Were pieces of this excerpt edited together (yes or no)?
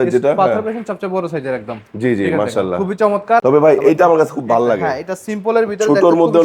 yes